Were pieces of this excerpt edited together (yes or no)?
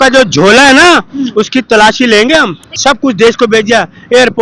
yes